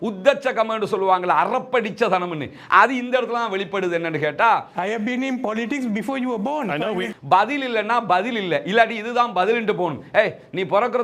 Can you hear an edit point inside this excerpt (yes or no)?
yes